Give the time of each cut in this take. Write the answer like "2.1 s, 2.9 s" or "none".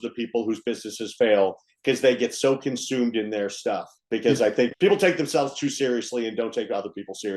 3.9 s, 4.7 s